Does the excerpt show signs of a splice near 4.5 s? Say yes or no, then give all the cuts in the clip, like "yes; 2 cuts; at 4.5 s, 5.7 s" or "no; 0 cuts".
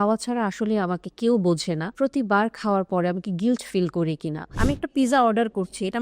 yes; 2 cuts; at 1.9 s, 4.5 s